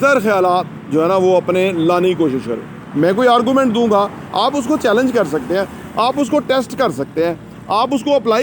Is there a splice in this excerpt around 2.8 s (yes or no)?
yes